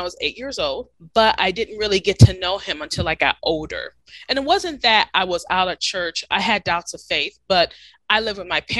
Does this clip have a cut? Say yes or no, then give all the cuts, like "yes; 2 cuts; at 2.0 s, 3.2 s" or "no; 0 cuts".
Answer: yes; 1 cut; at 1.0 s